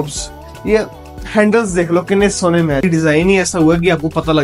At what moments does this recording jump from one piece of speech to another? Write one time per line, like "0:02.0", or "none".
0:02.8